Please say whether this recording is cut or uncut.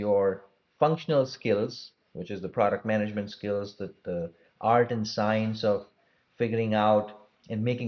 uncut